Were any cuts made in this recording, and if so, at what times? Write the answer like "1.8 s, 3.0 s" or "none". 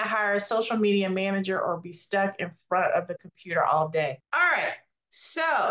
4.7 s